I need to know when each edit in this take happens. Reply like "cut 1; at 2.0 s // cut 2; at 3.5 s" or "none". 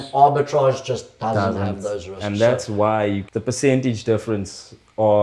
cut 1; at 3.2 s